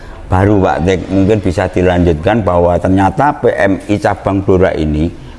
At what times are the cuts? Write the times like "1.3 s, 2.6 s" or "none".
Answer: none